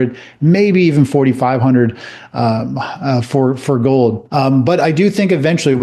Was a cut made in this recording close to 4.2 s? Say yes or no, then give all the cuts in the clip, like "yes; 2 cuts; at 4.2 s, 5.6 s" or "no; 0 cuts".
yes; 1 cut; at 4.2 s